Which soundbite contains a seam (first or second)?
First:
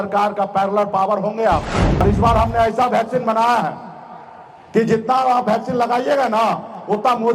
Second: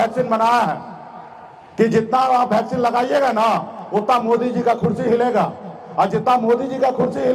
first